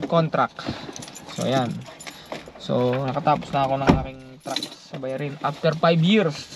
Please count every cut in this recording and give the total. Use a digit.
0